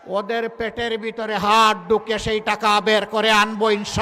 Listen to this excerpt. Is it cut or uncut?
uncut